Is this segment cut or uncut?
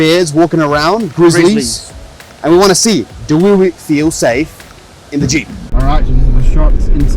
cut